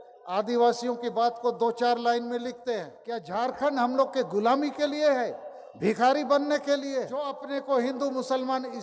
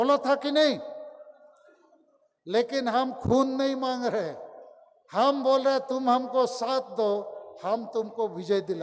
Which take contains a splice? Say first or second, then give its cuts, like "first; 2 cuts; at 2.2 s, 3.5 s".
first; 2 cuts; at 3.2 s, 7.5 s